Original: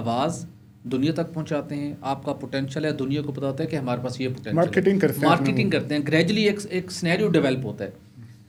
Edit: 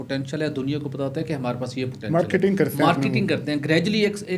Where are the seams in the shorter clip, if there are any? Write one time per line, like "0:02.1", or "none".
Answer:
none